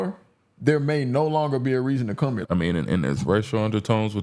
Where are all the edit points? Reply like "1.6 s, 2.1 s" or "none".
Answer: 2.4 s